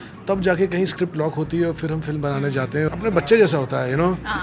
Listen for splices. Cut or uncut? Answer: cut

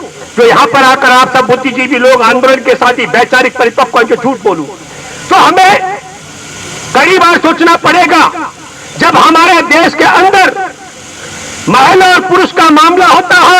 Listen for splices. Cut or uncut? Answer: uncut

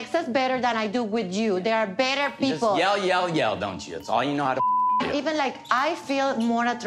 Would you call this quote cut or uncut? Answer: cut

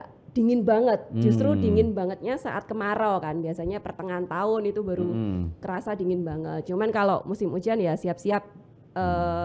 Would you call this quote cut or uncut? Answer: uncut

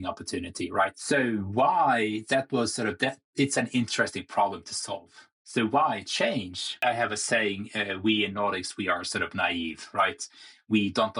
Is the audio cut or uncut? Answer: cut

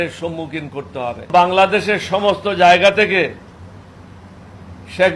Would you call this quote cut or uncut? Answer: cut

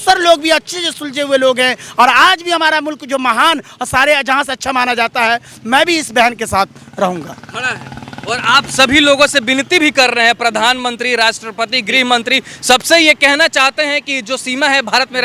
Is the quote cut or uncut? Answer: uncut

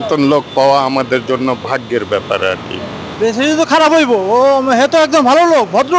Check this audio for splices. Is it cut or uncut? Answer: uncut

